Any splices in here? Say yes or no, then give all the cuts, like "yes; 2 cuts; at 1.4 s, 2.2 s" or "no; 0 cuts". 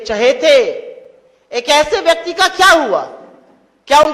no; 0 cuts